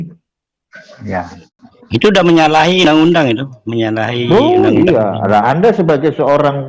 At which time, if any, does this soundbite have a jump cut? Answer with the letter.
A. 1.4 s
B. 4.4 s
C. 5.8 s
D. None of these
A